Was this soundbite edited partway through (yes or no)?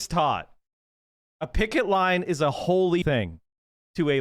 yes